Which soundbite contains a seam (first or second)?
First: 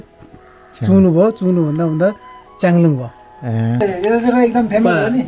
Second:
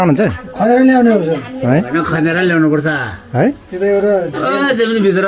first